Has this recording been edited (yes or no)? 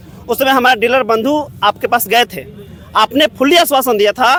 no